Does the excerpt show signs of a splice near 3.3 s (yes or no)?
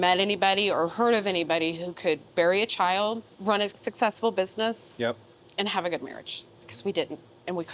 yes